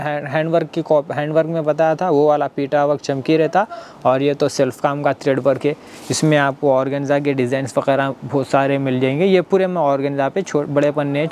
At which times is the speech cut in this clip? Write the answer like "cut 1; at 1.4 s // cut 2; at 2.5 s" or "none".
none